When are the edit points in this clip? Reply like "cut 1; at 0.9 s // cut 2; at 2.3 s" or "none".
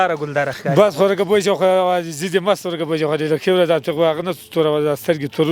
none